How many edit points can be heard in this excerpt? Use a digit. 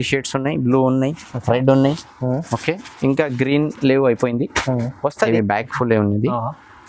1